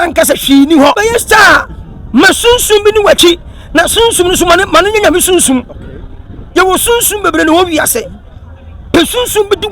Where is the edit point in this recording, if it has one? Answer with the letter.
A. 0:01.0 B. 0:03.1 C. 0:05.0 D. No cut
A